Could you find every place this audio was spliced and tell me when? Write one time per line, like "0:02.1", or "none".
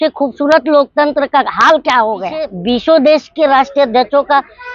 0:02.6